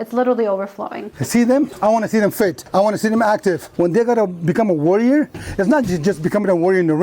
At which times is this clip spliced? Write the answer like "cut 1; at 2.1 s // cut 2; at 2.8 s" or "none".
cut 1; at 1.0 s // cut 2; at 1.7 s // cut 3; at 2.6 s // cut 4; at 3.7 s